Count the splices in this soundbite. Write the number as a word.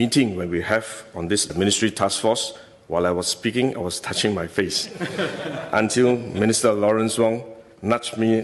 zero